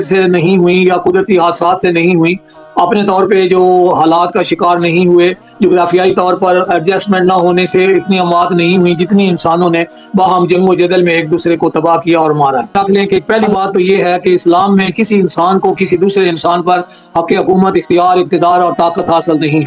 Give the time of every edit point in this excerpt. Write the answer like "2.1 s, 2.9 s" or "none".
13.1 s